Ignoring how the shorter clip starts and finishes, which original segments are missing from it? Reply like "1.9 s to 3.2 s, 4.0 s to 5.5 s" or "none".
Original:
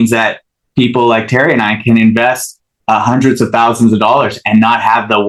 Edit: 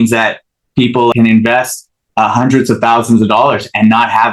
1.1 s to 1.8 s